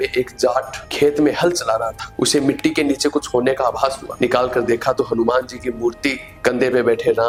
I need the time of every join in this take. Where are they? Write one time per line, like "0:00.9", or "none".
none